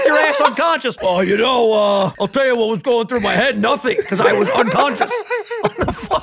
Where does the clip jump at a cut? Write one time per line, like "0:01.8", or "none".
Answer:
0:01.0
0:02.2